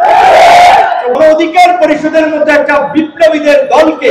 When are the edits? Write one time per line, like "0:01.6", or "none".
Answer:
0:01.2